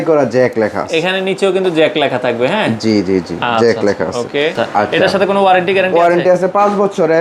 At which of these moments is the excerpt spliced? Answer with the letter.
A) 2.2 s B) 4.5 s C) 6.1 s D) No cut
B